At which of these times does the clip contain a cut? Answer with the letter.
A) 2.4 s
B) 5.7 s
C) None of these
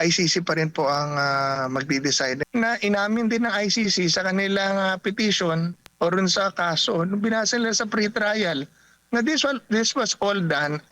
A